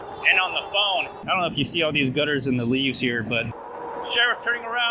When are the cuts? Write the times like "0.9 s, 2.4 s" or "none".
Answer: 1.1 s, 3.6 s